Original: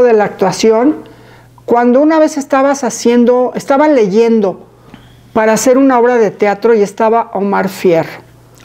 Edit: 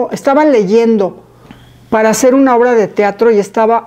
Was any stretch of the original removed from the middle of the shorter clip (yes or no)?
no